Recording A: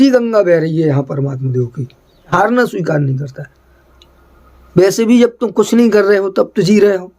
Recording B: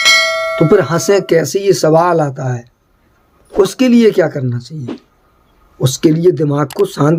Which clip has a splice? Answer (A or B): A